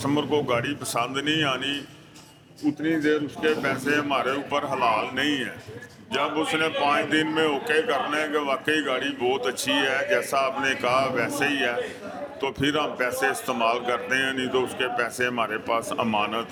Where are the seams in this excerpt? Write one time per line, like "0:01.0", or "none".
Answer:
none